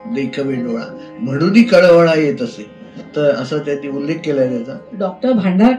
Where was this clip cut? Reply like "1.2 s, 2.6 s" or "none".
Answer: 4.8 s